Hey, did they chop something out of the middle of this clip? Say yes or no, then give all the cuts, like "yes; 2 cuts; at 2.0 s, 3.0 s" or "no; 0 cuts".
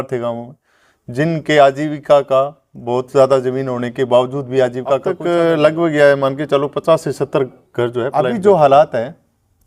yes; 2 cuts; at 5.1 s, 8.2 s